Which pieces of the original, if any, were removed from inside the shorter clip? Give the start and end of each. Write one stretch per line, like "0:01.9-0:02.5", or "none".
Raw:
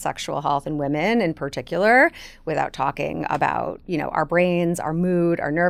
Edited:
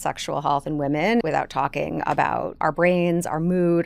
0:01.2-0:02.5
0:03.8-0:04.1